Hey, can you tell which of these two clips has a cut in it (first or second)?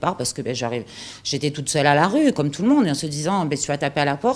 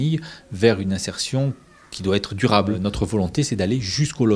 first